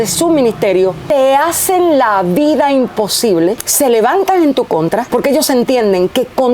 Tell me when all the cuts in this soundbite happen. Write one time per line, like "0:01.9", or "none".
0:01.0
0:03.7
0:05.1